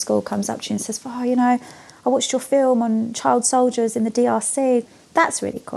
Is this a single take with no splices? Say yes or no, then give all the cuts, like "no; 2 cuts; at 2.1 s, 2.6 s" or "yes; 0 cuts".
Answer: no; 1 cut; at 4.9 s